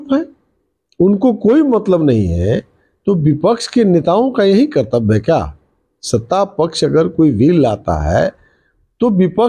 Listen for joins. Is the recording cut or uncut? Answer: uncut